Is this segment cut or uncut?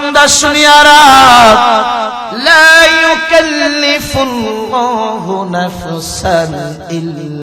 uncut